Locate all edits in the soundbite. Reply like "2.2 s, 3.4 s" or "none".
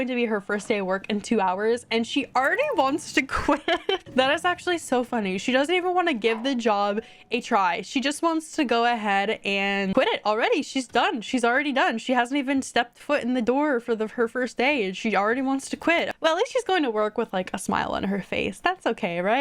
none